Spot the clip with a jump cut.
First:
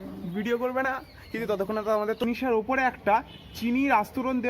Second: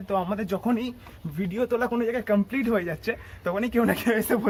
first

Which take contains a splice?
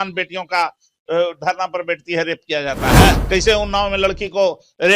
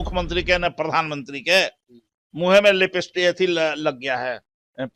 first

